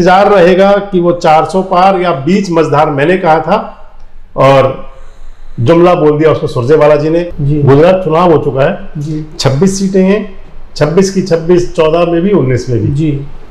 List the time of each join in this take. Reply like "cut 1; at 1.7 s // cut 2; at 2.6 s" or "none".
cut 1; at 7.4 s